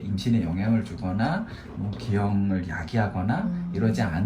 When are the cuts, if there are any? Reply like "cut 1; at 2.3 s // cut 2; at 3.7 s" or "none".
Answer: none